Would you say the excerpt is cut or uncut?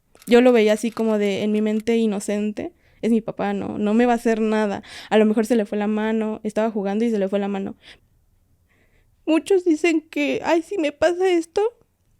cut